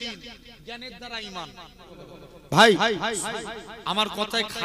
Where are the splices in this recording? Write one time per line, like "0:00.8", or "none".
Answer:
0:02.2